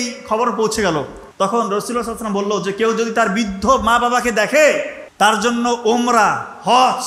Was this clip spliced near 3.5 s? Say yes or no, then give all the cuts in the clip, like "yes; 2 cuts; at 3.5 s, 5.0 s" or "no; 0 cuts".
no; 2 cuts; at 1.2 s, 5.0 s